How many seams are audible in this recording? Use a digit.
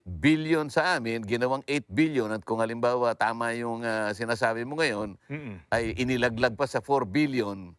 0